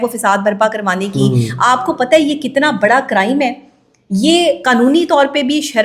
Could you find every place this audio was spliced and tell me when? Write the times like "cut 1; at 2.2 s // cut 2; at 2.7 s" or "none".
none